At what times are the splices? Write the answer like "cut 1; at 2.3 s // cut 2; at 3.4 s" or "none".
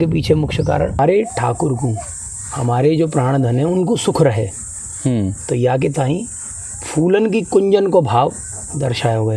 cut 1; at 1.0 s